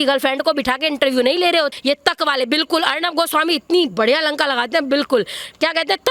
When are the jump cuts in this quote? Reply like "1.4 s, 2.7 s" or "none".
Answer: 1.7 s